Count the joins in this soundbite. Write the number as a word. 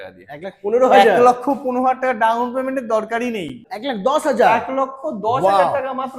one